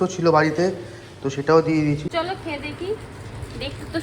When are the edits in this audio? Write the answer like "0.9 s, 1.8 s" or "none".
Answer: 2.1 s

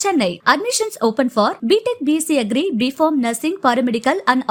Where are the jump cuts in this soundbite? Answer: none

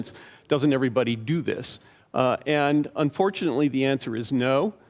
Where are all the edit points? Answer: none

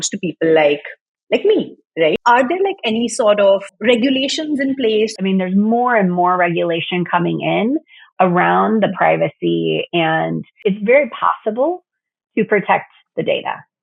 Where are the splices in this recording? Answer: 2.2 s, 3.7 s, 5.2 s, 10.5 s

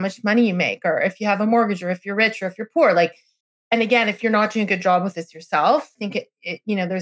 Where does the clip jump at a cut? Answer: 6.0 s

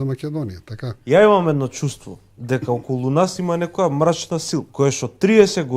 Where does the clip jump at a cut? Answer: 0.9 s, 4.7 s

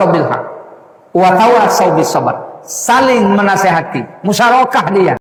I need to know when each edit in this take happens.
none

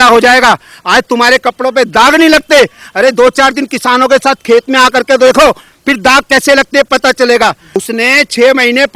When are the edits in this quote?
7.8 s

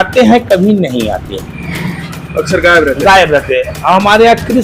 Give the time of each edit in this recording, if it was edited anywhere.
none

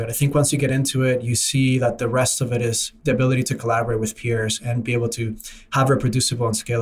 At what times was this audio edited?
none

